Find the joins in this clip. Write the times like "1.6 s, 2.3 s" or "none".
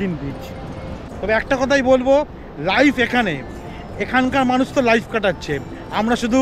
1.0 s